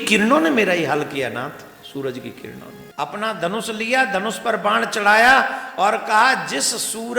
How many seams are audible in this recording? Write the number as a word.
one